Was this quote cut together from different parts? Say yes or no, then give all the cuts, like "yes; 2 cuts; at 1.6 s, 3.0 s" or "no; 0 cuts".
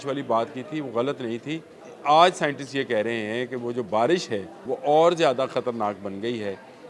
yes; 2 cuts; at 1.8 s, 4.5 s